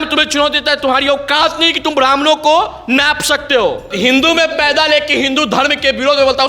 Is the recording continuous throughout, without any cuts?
no; 1 cut; at 3.9 s

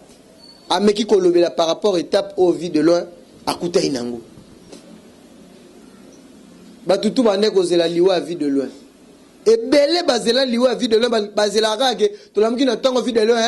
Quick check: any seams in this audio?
yes; 1 cut; at 4.7 s

